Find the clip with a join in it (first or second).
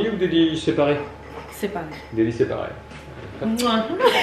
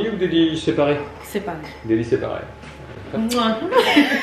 second